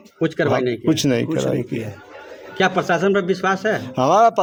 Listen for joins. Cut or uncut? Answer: uncut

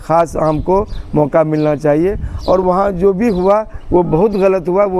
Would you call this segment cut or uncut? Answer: uncut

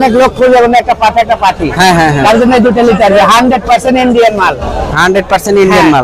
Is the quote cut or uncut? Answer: uncut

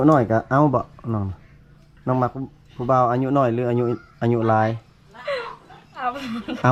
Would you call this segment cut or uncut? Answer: uncut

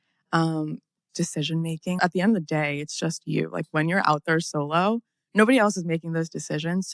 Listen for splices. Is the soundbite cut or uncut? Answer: cut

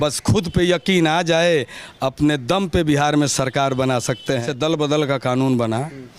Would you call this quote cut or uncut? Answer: cut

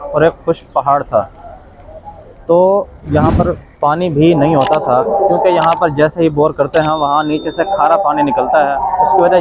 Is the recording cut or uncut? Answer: uncut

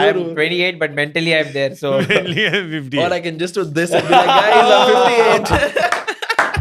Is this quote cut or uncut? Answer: uncut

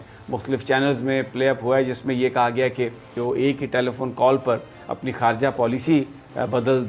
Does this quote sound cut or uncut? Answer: cut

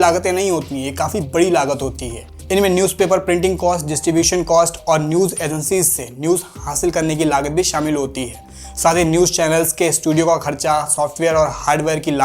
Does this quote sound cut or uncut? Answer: uncut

